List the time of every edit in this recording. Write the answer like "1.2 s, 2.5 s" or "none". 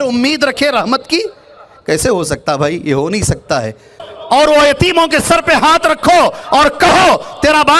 4.0 s